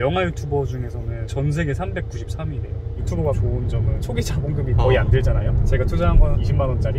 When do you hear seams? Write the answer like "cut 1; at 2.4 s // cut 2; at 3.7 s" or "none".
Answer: none